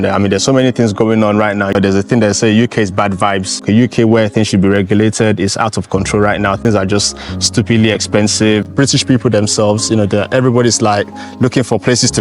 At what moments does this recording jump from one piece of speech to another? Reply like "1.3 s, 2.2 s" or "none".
1.7 s, 3.6 s, 8.7 s